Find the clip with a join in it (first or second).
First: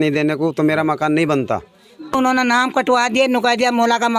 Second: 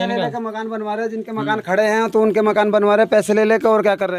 first